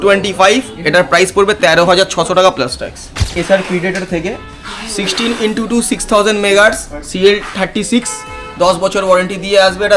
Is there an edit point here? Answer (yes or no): yes